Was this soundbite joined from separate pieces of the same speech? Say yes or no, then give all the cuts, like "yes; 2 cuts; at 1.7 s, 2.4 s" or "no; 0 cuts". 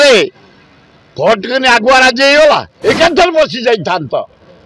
yes; 1 cut; at 2.7 s